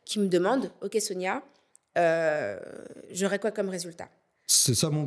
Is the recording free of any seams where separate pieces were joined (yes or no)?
yes